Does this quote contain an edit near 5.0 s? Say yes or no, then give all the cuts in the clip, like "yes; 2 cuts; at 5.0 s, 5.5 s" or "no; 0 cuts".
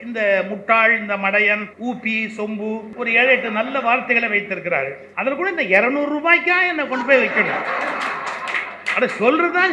yes; 3 cuts; at 1.7 s, 2.9 s, 5.0 s